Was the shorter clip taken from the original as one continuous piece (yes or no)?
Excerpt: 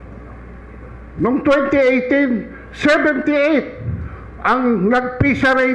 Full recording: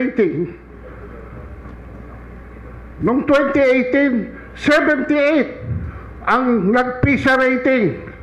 yes